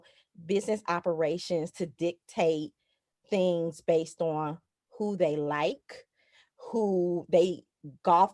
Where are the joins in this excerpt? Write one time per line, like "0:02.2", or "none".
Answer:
none